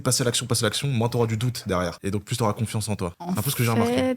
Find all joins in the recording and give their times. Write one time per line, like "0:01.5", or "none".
none